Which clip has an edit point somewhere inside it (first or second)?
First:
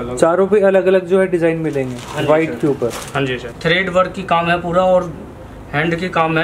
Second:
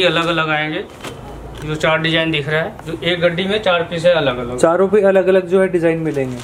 first